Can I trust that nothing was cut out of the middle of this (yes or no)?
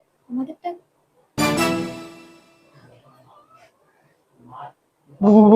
yes